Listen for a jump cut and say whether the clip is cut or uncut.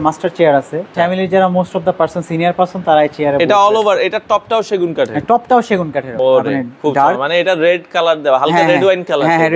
cut